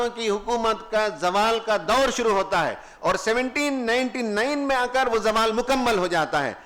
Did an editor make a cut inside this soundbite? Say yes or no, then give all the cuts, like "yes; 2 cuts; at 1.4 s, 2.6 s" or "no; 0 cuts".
no; 0 cuts